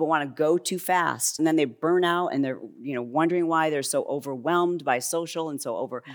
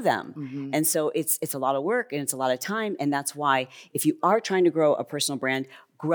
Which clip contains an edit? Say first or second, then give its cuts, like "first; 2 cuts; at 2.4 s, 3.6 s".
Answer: first; 1 cut; at 1.3 s